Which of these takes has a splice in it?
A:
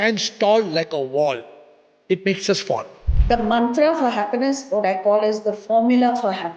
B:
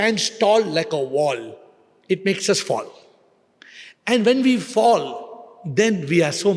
A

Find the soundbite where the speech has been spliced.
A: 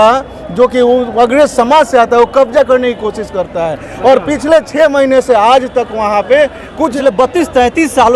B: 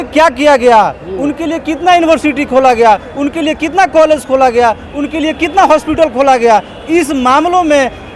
A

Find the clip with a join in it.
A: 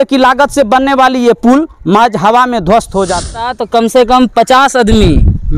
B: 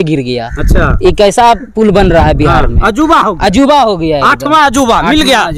A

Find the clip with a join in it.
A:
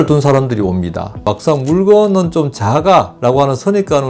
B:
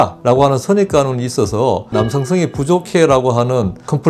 A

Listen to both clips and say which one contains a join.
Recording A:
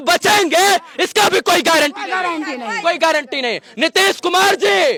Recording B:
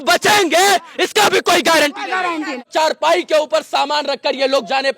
B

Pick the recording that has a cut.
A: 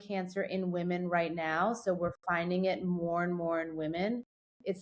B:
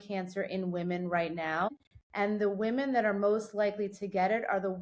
B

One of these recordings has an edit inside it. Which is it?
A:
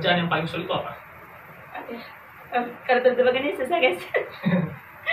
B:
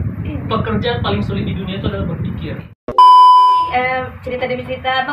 B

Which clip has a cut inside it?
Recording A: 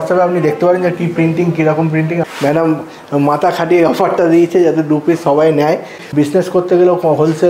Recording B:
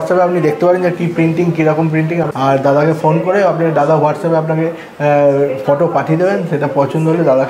A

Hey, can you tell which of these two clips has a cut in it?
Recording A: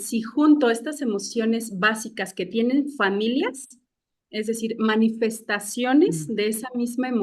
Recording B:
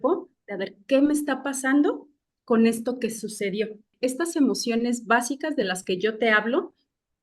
B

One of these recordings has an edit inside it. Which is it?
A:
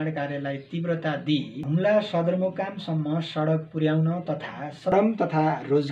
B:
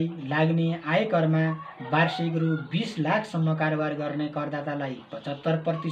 A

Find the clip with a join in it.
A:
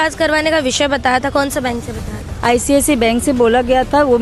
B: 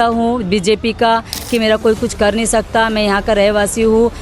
B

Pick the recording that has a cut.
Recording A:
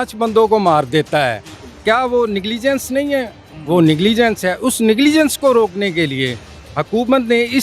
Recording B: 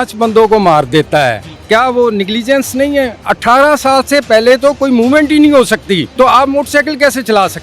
B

